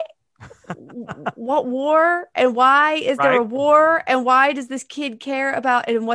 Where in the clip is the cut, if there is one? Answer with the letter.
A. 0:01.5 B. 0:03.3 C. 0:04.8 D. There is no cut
D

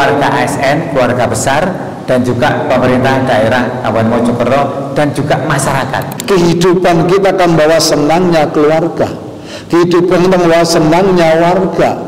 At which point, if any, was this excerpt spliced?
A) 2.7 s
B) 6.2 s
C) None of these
B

